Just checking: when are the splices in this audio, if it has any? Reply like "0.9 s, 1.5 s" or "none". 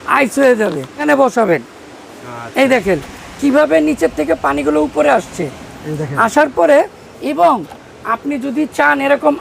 1.0 s